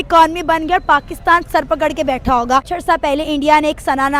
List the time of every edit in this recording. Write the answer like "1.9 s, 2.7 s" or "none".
2.7 s